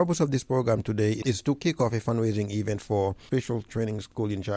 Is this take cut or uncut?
uncut